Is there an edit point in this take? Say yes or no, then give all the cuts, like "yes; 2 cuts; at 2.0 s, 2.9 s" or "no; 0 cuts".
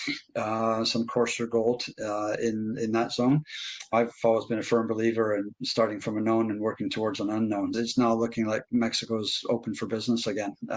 yes; 2 cuts; at 3.9 s, 7.7 s